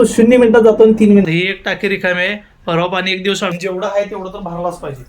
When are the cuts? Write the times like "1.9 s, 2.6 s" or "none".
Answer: 1.2 s, 3.5 s